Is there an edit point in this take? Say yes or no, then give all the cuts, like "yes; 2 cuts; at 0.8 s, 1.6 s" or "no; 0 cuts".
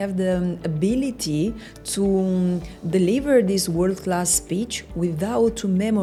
no; 0 cuts